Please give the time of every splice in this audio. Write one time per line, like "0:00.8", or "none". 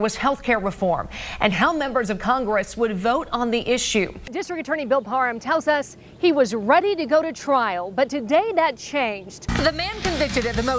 0:04.3
0:09.4